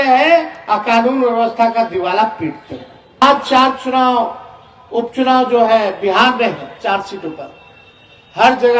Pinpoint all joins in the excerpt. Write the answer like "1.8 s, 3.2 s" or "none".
3.2 s